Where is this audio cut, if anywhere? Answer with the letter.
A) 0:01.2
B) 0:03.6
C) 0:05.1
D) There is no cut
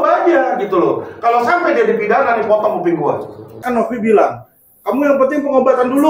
B